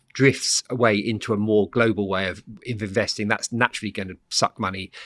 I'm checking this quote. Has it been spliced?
no; 0 cuts

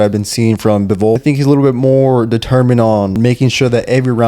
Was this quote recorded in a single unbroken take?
no; 2 cuts; at 1.2 s, 3.2 s

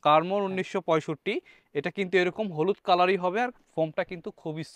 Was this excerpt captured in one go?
yes; 0 cuts

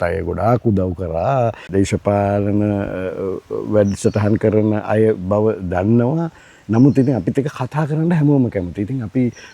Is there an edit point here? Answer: yes; 1 cut; at 1.6 s

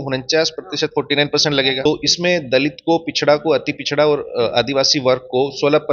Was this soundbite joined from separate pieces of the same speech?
yes; 1 cut; at 1.8 s

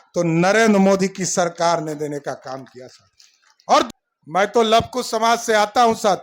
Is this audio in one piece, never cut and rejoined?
no; 1 cut; at 3.9 s

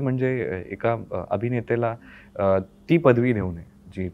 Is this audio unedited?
yes; 0 cuts

